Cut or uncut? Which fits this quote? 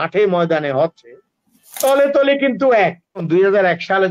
cut